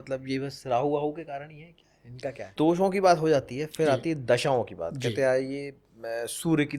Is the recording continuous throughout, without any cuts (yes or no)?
no